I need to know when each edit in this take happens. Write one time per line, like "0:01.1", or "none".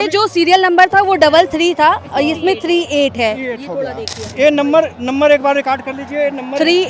0:04.1

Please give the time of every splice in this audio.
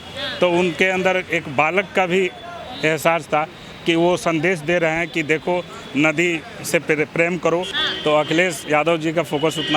0:07.8

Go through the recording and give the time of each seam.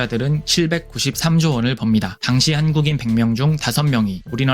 0:02.2

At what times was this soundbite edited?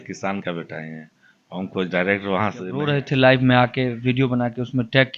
0:02.9

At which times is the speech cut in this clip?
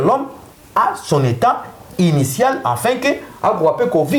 none

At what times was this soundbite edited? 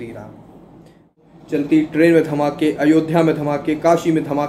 0:01.2

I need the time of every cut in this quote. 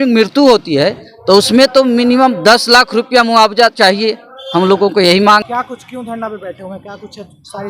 0:05.4

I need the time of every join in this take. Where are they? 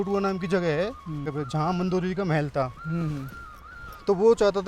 0:01.4

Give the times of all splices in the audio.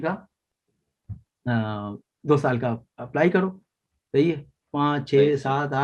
none

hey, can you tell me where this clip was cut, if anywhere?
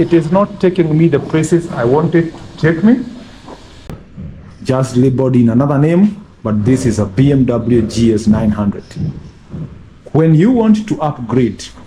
0:03.9

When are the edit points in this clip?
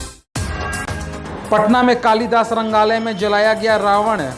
0:01.1

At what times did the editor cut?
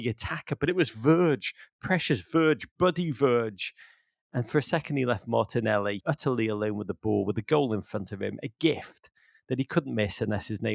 0:06.0

